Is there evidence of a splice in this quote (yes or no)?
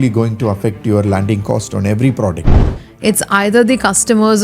yes